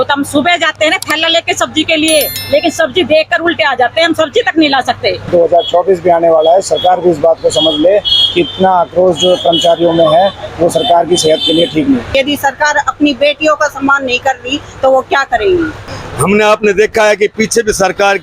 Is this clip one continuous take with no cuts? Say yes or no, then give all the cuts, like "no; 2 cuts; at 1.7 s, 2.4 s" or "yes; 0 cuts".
no; 3 cuts; at 5.3 s, 12.1 s, 15.9 s